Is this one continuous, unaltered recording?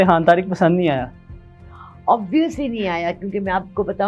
yes; 0 cuts

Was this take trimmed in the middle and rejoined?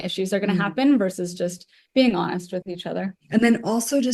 yes; 1 cut; at 3.2 s

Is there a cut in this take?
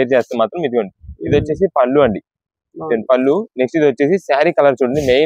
no; 0 cuts

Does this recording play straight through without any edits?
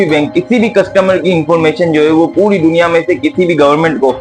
yes; 0 cuts

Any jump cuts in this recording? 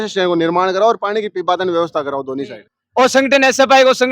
yes; 1 cut; at 2.6 s

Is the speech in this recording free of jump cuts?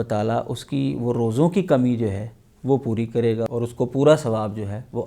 yes; 0 cuts

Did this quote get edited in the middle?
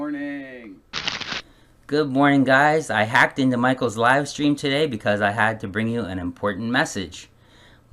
no; 0 cuts

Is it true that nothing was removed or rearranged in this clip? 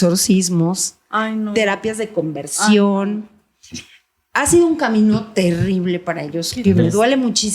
yes; 0 cuts

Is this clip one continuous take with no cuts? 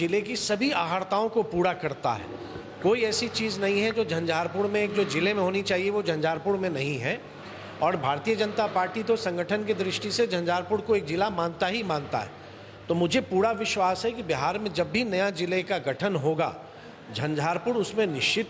yes; 0 cuts

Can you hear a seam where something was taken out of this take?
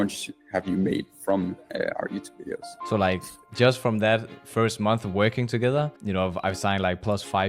yes; 3 cuts; at 2.7 s, 4.4 s, 6.0 s

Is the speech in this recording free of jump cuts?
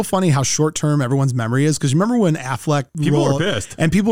no; 1 cut; at 2.9 s

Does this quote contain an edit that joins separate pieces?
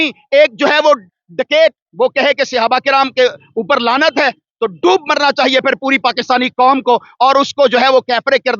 no; 0 cuts

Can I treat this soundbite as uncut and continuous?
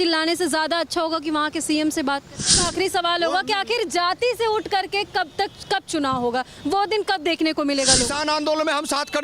no; 2 cuts; at 2.6 s, 8.1 s

